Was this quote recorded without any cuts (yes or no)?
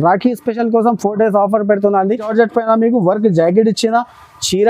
no